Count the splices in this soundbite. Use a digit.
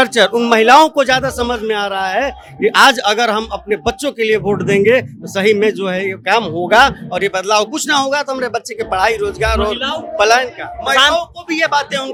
0